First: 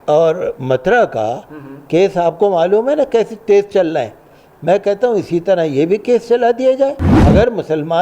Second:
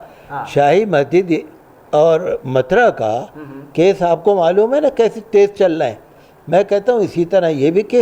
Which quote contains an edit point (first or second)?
first